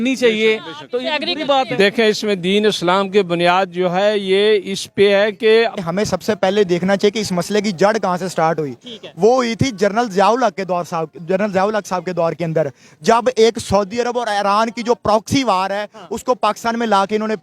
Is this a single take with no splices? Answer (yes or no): no